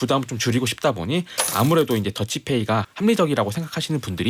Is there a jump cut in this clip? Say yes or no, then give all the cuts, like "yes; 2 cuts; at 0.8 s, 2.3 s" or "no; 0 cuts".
yes; 1 cut; at 2.9 s